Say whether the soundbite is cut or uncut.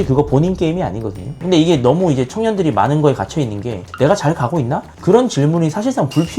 cut